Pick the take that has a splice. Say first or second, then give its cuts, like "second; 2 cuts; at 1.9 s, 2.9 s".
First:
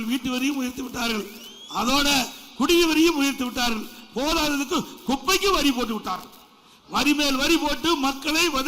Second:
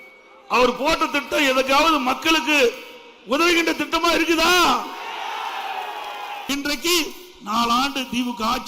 second; 1 cut; at 6.5 s